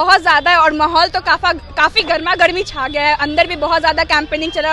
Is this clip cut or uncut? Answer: uncut